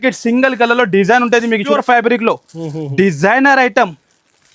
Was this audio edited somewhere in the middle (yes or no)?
yes